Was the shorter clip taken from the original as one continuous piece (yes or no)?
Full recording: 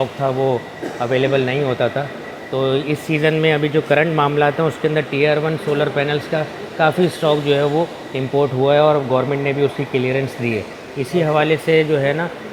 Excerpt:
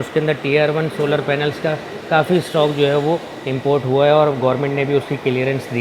yes